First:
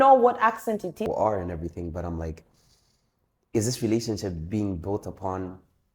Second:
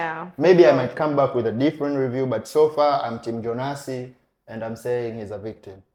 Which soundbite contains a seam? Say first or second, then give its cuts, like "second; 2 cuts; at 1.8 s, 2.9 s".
first; 1 cut; at 1.0 s